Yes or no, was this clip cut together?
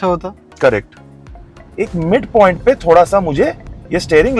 yes